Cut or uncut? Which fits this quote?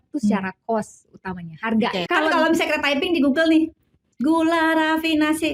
cut